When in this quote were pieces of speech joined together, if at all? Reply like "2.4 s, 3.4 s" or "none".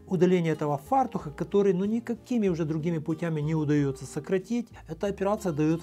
4.8 s